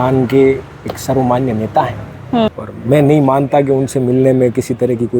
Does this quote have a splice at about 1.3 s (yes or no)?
no